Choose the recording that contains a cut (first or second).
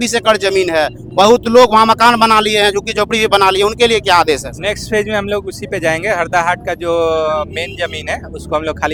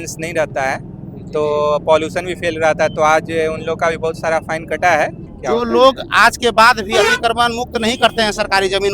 second